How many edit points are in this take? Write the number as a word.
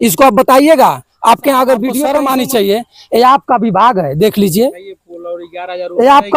one